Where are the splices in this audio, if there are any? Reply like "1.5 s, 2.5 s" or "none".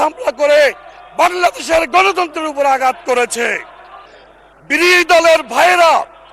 4.0 s